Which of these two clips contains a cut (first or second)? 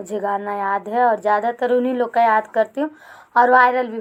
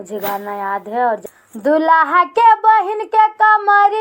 second